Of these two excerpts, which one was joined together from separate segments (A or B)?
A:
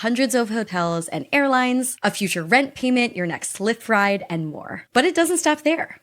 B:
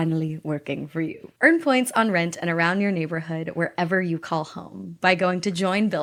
A